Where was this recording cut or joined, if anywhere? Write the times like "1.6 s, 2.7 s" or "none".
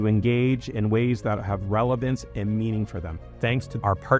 none